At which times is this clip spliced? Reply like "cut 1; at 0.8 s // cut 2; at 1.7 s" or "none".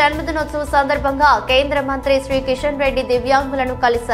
none